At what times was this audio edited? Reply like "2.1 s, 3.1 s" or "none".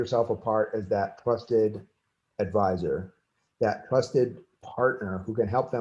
none